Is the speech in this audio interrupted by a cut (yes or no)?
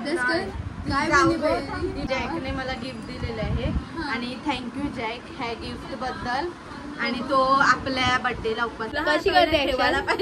yes